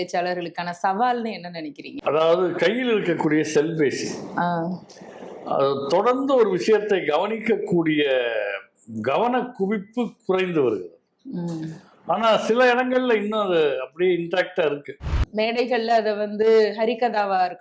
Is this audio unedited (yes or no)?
no